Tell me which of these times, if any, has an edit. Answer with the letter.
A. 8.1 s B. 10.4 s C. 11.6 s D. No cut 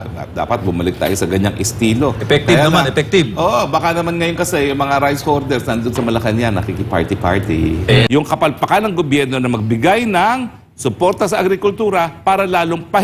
A